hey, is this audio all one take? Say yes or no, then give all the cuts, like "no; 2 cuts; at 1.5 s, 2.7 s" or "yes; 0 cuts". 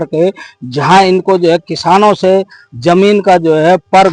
yes; 0 cuts